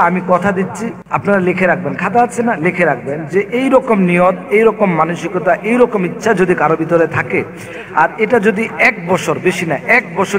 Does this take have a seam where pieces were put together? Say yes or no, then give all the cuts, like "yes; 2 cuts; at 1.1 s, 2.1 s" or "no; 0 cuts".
yes; 1 cut; at 0.9 s